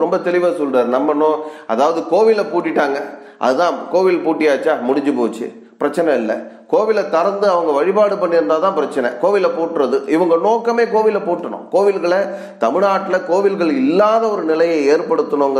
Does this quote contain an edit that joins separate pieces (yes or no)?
no